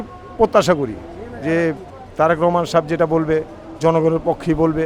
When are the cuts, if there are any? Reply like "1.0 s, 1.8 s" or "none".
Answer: none